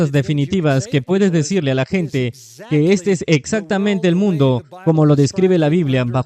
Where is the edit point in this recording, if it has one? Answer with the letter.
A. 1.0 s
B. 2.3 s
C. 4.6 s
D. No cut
D